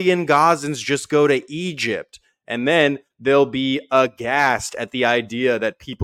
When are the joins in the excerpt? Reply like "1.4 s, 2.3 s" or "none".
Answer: none